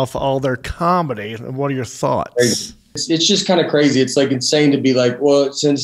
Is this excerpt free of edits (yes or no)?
no